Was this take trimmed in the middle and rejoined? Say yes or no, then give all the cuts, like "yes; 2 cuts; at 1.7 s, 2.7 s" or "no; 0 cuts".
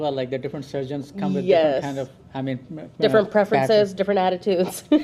no; 0 cuts